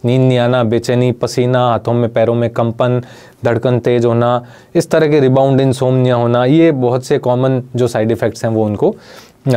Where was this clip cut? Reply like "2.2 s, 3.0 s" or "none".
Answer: none